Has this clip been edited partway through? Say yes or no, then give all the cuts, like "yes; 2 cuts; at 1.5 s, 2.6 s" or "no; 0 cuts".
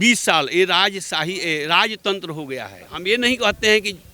yes; 1 cut; at 2.9 s